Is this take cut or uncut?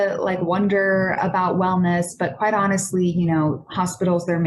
uncut